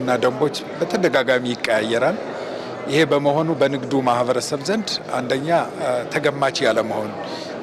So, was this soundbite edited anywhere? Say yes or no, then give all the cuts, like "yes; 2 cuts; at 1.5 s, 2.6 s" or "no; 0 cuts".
no; 0 cuts